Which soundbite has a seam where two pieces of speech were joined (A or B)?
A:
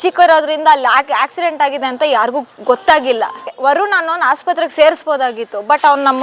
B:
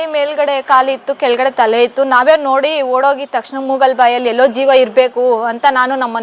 A